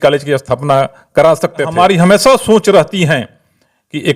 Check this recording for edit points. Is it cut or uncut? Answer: cut